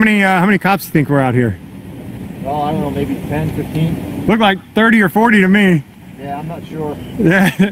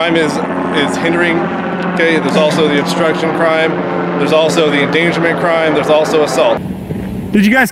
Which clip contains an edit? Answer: second; 1 cut; at 6.8 s

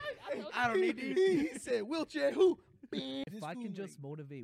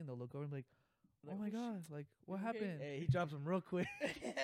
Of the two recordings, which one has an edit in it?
first; 1 cut; at 3.2 s

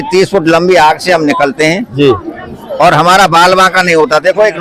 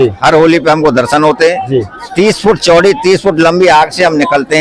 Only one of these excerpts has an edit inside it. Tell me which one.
second; 1 cut; at 1.9 s

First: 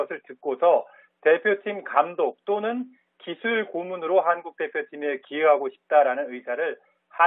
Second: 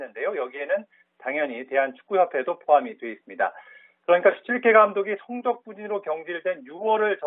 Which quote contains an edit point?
second; 1 cut; at 5.4 s

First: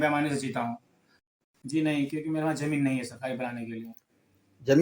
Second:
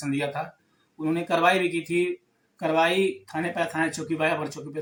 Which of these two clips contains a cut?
first; 1 cut; at 1.3 s

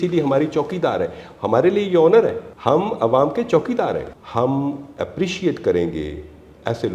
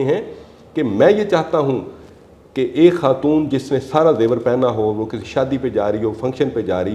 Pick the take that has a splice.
first; 2 cuts; at 2.5 s, 4.2 s

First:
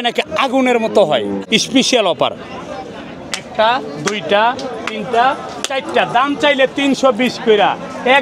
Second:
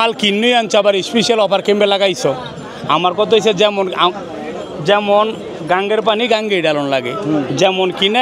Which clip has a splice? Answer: first; 1 cut; at 1.4 s

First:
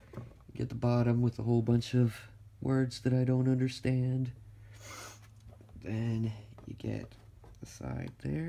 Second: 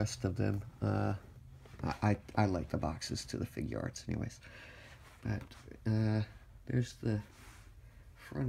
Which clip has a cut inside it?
second; 1 cut; at 6.1 s

